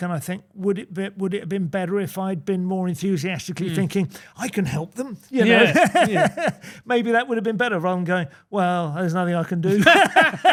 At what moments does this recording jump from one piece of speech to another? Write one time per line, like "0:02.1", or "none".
none